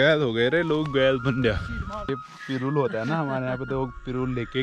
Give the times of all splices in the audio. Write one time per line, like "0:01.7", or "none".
0:02.1